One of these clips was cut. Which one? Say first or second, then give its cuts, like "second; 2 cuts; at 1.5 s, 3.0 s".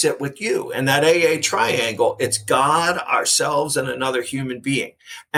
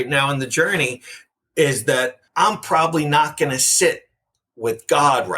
second; 1 cut; at 2.2 s